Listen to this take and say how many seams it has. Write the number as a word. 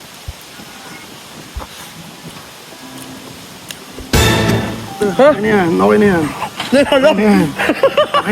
two